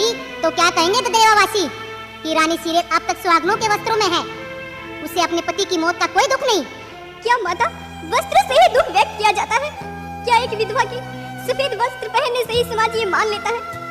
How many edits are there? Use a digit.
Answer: 0